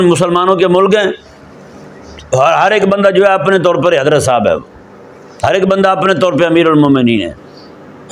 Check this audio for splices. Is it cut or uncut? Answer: uncut